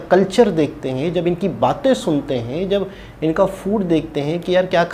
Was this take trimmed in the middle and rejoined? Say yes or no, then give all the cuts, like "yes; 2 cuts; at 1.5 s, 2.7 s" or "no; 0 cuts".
no; 0 cuts